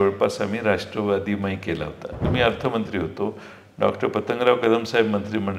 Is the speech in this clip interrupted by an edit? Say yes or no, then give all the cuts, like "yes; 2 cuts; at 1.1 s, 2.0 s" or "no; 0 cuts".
yes; 1 cut; at 2.2 s